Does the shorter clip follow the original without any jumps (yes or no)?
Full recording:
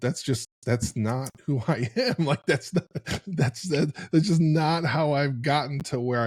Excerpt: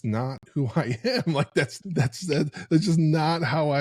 no